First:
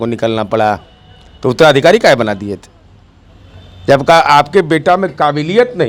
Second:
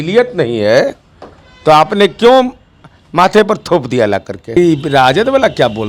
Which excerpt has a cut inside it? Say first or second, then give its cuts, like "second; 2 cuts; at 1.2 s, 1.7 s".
second; 1 cut; at 4.6 s